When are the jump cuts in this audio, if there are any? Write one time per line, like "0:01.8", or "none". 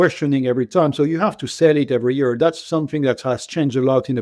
none